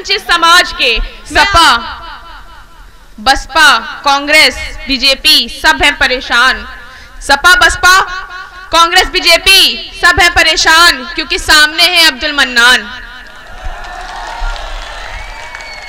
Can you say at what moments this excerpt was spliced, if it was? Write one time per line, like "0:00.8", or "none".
0:01.1